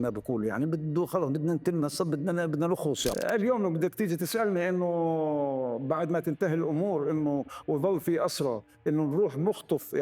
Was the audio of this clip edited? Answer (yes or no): yes